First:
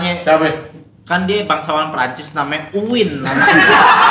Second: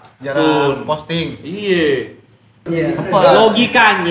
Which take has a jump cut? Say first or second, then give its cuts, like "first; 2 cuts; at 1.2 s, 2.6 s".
second; 1 cut; at 2.6 s